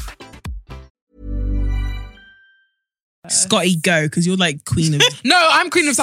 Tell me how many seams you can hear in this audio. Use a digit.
2